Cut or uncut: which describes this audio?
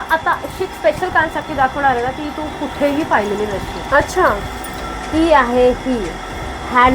uncut